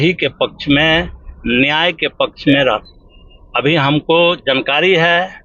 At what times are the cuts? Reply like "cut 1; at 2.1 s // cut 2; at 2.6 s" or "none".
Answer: none